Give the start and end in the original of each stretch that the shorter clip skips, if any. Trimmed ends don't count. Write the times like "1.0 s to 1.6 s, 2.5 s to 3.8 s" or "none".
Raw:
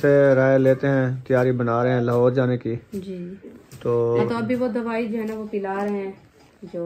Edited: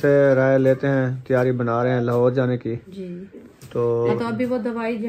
2.9 s to 3.0 s